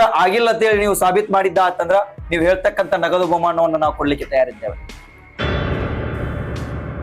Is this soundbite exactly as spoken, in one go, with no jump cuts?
yes; 0 cuts

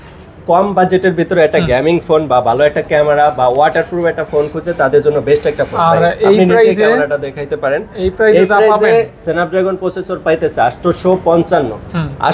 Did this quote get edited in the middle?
no; 0 cuts

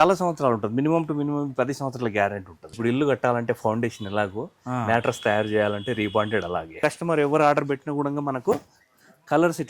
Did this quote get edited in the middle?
yes; 2 cuts; at 2.6 s, 6.7 s

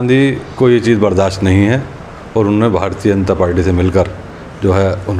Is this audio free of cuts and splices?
yes; 0 cuts

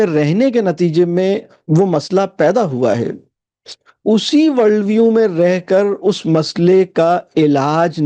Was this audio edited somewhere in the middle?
no; 0 cuts

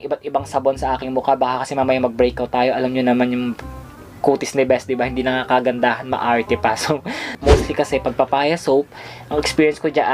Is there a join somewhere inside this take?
yes; 1 cut; at 7.2 s

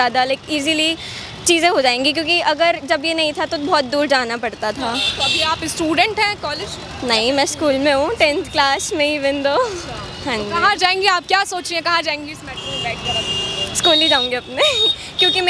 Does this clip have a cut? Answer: no; 0 cuts

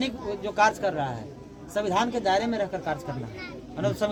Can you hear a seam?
no; 0 cuts

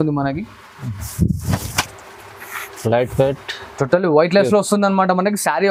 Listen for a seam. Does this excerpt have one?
no; 0 cuts

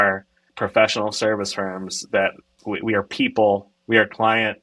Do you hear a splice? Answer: no; 0 cuts

